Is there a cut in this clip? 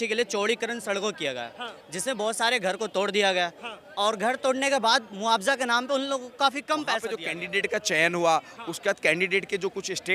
yes; 1 cut; at 7.2 s

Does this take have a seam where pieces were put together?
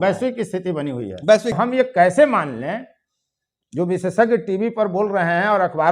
yes; 1 cut; at 1.6 s

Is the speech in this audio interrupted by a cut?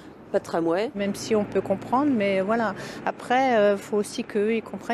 yes; 1 cut; at 0.9 s

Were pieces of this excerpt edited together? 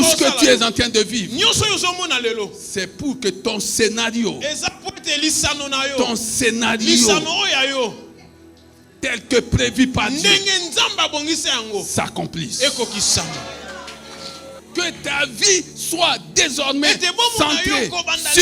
yes; 1 cut; at 14.5 s

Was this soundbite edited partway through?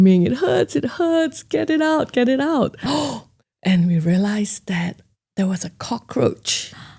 yes; 1 cut; at 2.8 s

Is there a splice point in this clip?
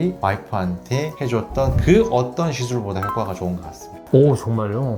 no; 0 cuts

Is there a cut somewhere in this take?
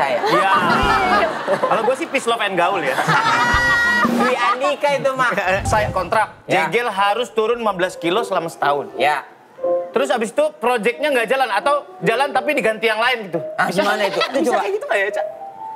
yes; 3 cuts; at 1.3 s, 5.6 s, 14.3 s

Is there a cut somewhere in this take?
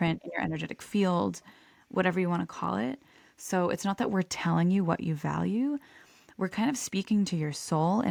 no; 0 cuts

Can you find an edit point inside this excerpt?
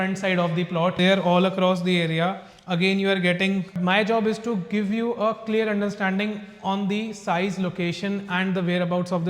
yes; 2 cuts; at 1.0 s, 3.7 s

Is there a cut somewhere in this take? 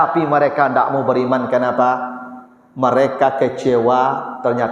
no; 0 cuts

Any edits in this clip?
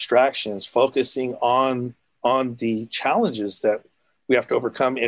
no; 0 cuts

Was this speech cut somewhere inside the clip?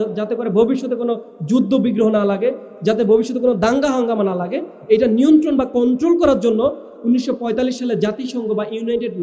no; 0 cuts

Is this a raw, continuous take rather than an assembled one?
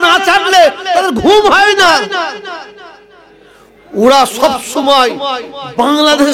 yes; 0 cuts

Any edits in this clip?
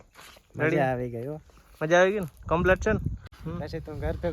yes; 1 cut; at 3.3 s

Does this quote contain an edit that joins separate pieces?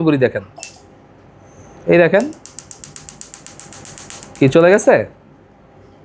no; 0 cuts

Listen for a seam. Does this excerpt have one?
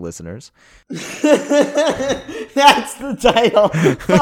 yes; 1 cut; at 1.1 s

